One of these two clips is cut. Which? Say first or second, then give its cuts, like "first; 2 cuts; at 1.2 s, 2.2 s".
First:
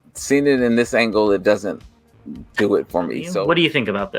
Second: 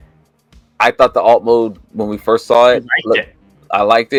first; 1 cut; at 3.2 s